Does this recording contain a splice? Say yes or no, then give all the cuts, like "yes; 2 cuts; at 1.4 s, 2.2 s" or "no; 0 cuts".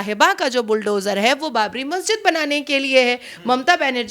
no; 0 cuts